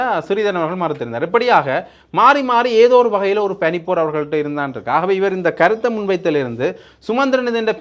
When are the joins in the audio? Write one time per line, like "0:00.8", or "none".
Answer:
none